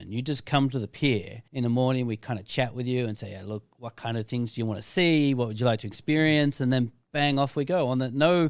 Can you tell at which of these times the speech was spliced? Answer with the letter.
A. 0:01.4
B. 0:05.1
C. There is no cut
A